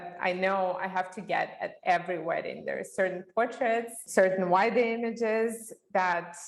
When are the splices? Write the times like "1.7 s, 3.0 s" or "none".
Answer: 4.0 s